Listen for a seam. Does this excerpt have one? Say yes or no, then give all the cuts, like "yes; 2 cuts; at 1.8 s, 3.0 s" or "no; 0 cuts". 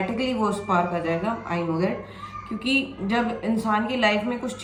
no; 0 cuts